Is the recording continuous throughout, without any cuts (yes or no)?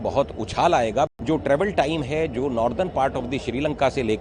no